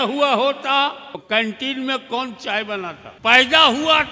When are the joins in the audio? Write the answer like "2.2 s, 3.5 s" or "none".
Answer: 1.2 s, 3.0 s